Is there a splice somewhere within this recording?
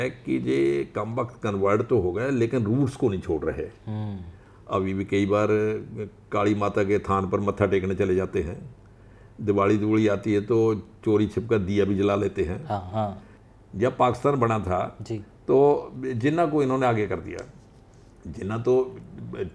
yes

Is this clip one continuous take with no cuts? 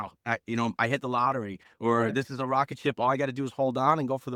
yes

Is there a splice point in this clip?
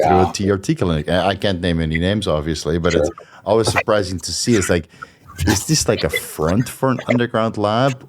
no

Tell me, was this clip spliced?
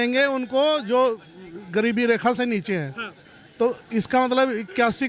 no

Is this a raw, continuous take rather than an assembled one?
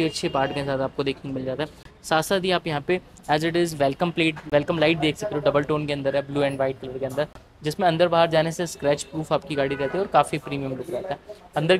yes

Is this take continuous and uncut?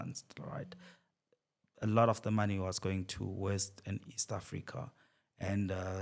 yes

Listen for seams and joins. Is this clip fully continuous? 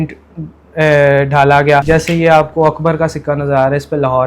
no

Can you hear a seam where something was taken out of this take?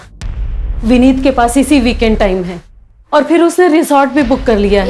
no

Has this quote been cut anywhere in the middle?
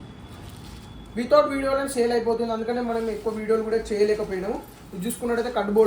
no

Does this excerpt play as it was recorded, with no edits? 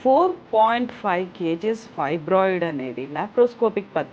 yes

